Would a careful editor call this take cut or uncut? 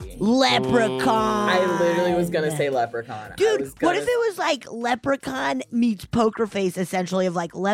cut